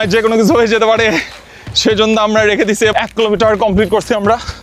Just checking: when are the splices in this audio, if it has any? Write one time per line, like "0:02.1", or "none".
0:02.9